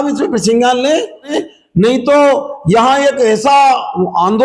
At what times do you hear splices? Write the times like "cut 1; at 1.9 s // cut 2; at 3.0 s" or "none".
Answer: cut 1; at 1.3 s